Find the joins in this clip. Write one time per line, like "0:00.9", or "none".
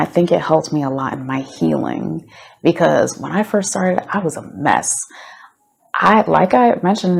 none